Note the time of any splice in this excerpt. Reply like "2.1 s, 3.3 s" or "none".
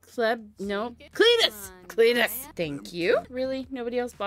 2.5 s, 3.3 s